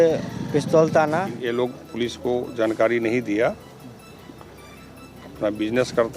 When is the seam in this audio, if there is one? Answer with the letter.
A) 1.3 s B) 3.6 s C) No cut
A